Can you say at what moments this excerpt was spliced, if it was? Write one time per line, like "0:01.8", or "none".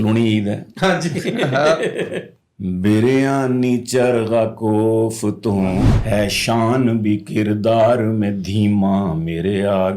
0:05.9